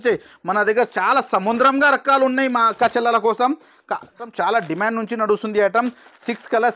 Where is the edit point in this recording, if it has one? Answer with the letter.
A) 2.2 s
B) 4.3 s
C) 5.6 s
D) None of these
B